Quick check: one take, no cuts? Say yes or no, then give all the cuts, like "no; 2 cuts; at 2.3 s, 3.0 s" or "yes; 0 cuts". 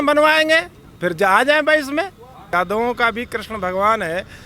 no; 1 cut; at 2.4 s